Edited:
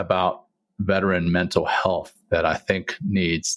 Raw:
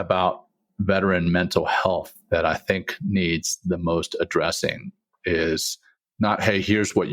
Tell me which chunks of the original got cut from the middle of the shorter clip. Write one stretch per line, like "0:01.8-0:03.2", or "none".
none